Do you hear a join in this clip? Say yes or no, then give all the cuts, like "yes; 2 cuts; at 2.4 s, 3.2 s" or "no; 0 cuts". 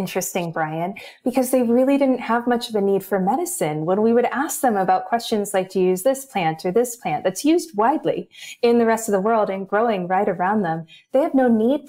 no; 0 cuts